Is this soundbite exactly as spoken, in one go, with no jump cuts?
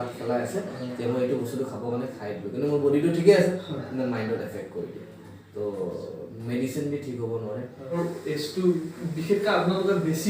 no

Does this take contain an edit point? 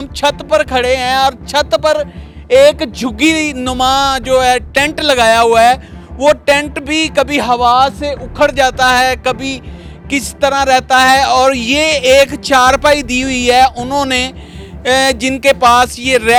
no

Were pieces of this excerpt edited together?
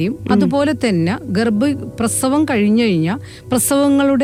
no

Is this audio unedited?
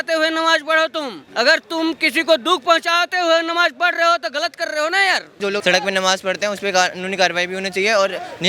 no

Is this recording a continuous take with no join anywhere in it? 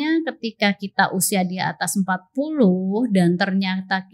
yes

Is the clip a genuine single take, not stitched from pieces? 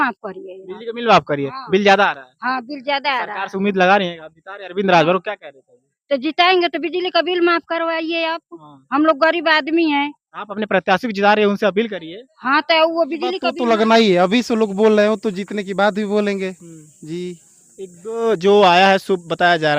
no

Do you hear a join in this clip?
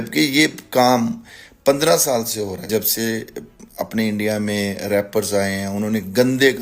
yes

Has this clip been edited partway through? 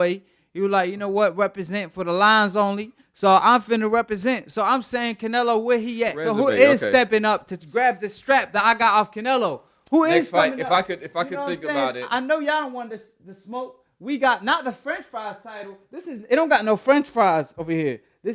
yes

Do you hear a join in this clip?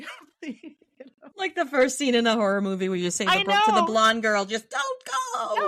no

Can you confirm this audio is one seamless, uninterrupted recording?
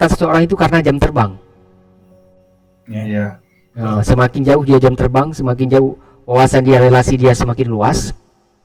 yes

